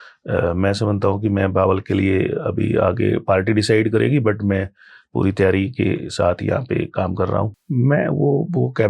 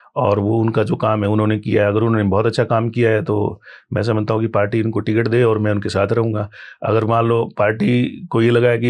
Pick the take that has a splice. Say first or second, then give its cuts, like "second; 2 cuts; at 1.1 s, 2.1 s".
first; 1 cut; at 7.6 s